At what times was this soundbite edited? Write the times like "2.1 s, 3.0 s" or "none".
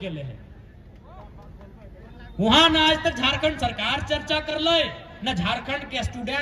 none